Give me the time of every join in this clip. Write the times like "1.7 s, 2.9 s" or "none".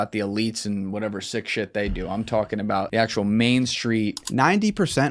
2.9 s, 4.2 s